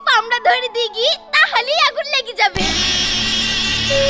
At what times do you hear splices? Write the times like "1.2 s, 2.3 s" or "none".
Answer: none